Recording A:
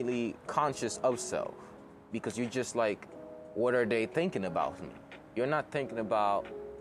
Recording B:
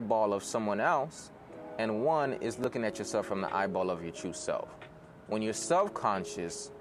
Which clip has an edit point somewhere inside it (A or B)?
B